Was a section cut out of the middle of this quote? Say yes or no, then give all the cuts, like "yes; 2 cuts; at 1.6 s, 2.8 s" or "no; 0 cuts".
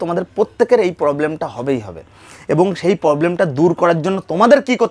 no; 0 cuts